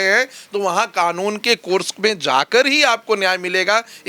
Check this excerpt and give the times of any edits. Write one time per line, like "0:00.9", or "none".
none